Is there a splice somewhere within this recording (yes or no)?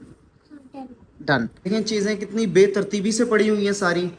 yes